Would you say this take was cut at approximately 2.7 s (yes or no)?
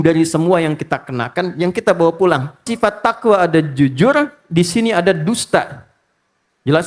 yes